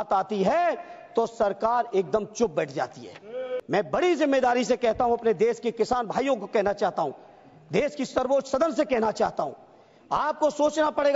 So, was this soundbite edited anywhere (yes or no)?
yes